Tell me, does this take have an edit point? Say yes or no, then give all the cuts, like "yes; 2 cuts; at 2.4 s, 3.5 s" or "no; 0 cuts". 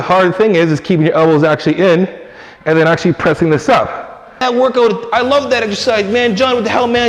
yes; 1 cut; at 4.4 s